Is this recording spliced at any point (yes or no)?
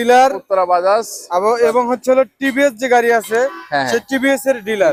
no